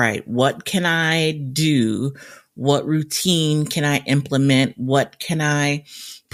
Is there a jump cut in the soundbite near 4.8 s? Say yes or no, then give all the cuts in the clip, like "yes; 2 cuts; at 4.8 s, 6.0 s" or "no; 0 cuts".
no; 0 cuts